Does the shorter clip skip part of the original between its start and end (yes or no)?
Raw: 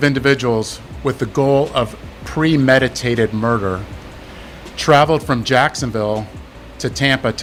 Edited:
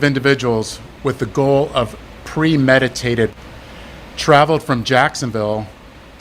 yes